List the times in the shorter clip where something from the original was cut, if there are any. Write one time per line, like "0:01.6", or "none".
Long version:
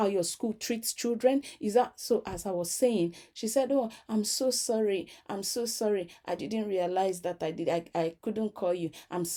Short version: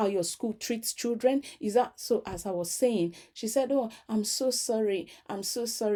none